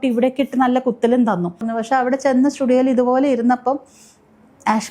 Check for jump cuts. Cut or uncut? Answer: cut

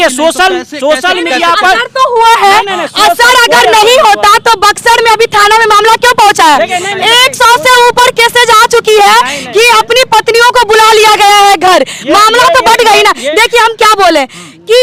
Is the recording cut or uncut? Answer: uncut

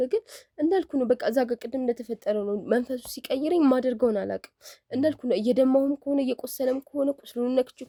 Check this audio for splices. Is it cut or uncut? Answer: uncut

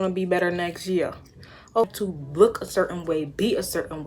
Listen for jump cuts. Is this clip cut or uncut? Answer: cut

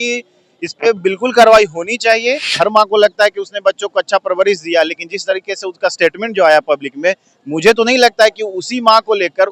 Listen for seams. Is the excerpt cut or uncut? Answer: cut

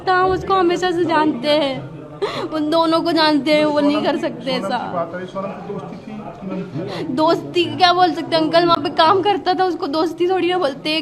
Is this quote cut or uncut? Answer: uncut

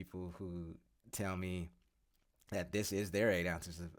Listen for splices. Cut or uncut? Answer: uncut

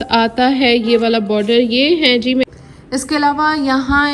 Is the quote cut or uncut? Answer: cut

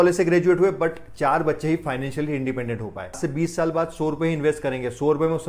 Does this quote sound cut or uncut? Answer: cut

